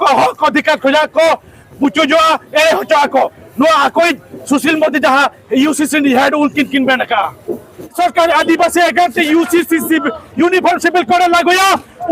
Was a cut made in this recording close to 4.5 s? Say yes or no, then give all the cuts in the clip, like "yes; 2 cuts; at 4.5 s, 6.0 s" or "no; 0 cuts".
no; 1 cut; at 7.9 s